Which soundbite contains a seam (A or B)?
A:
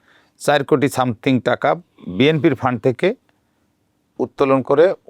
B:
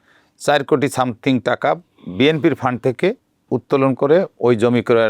B